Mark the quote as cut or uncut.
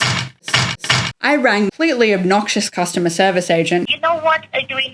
cut